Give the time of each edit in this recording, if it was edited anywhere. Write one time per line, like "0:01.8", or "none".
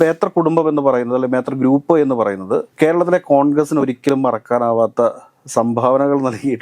0:02.7